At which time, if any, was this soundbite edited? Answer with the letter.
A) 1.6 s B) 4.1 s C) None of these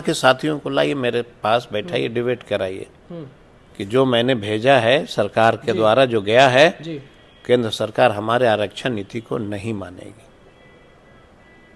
C